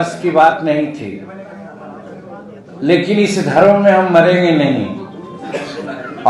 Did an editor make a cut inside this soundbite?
no; 0 cuts

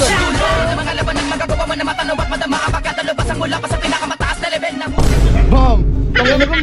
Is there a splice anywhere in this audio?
no; 0 cuts

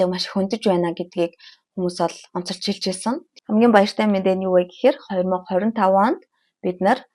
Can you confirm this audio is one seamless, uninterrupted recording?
no; 1 cut; at 3.3 s

